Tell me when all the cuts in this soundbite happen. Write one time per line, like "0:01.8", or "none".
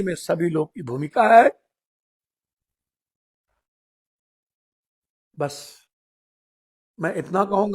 none